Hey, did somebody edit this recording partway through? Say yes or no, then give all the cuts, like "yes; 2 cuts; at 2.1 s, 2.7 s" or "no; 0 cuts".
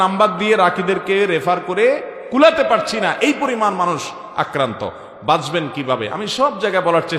no; 0 cuts